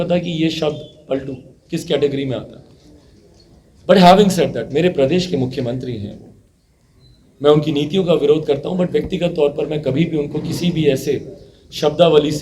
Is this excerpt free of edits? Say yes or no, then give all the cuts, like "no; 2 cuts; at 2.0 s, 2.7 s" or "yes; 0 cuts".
yes; 0 cuts